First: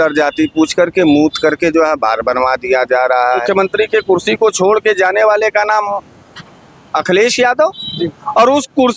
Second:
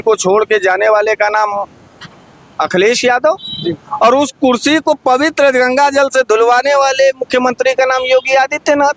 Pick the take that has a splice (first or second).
first